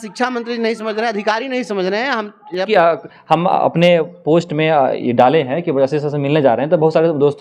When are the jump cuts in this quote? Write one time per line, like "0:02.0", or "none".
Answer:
0:02.7